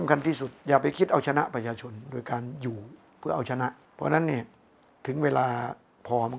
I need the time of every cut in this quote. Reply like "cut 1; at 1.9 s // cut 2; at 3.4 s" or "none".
cut 1; at 3.9 s